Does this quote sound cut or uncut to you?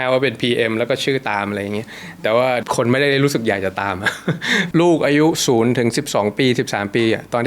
cut